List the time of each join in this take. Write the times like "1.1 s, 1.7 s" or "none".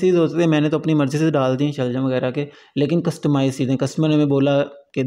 none